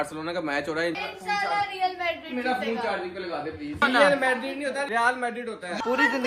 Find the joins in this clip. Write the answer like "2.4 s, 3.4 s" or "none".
1.0 s, 3.8 s, 5.2 s